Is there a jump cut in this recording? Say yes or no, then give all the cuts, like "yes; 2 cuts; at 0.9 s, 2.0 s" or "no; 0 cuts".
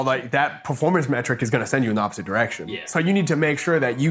no; 0 cuts